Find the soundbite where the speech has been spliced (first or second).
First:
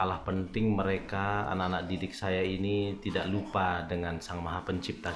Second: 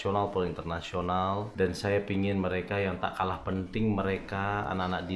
second